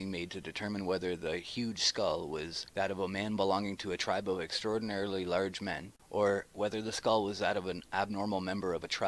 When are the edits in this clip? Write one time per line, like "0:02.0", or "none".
none